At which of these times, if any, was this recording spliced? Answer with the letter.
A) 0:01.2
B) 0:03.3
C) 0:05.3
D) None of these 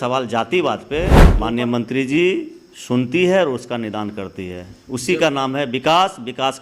A